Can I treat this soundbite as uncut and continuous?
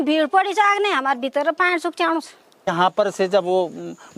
no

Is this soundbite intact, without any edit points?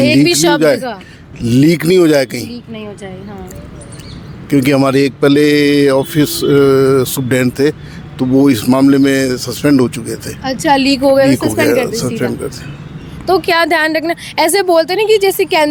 yes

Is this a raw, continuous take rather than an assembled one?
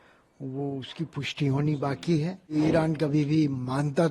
no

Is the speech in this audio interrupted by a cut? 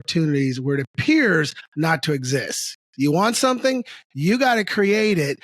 yes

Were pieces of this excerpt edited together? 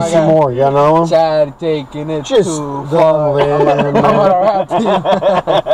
no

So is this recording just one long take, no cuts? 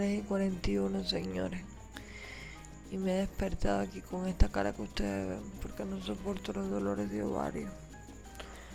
yes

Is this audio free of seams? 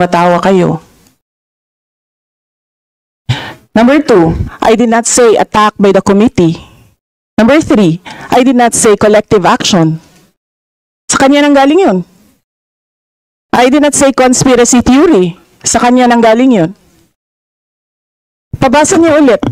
yes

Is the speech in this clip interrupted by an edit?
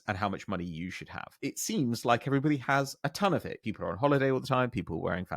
yes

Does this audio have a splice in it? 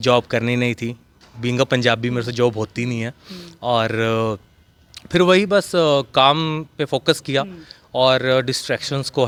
no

